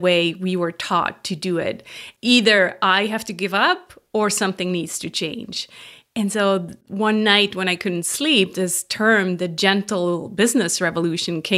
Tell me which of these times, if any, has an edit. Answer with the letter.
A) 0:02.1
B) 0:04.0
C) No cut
A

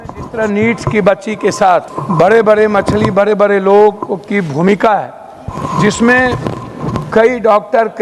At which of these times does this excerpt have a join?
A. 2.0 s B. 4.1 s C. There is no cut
A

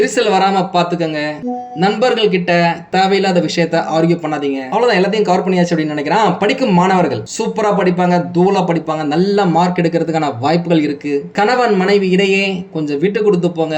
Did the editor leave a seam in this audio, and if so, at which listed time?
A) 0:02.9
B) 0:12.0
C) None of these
A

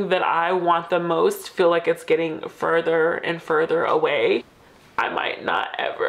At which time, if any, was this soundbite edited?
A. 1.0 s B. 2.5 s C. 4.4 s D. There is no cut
C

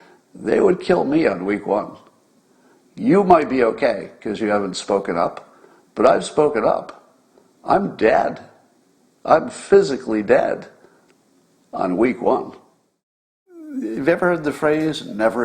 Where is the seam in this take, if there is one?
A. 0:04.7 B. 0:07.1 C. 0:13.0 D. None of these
C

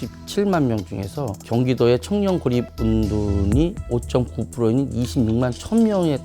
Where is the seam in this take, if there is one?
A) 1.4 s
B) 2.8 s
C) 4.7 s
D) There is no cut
A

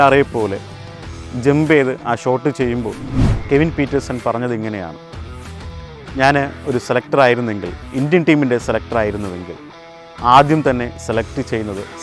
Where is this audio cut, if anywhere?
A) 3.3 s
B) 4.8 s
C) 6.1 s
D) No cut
A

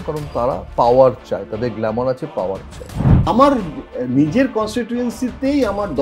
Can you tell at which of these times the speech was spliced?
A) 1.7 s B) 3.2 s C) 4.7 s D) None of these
B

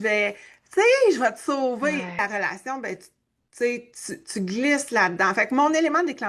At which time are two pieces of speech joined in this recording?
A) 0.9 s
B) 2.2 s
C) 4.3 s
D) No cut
B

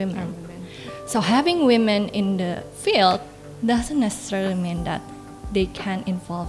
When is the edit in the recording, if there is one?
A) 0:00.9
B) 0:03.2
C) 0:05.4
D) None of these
A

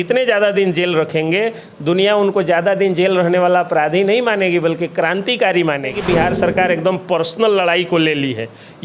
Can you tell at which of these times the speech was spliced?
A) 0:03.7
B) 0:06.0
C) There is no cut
B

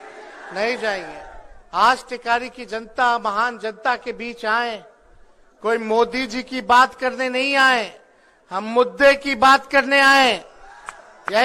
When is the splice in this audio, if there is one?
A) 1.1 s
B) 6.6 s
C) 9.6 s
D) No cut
D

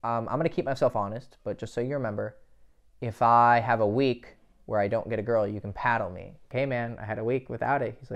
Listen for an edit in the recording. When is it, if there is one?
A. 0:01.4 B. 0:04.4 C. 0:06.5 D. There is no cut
C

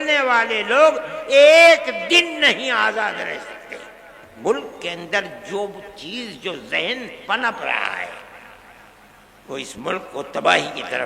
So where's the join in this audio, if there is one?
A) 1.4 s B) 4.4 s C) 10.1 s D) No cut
B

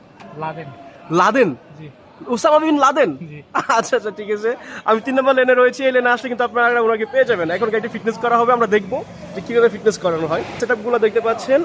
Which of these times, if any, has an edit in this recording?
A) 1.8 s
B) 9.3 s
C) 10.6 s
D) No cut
C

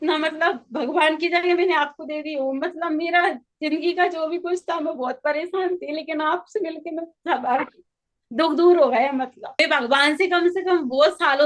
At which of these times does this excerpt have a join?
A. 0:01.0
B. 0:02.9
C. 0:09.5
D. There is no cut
C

